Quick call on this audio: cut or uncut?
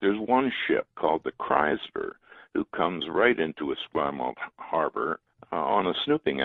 cut